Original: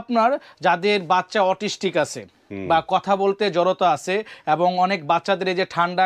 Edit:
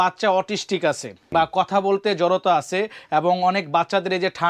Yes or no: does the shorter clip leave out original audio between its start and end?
yes